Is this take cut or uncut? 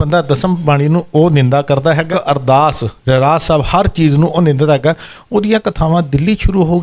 cut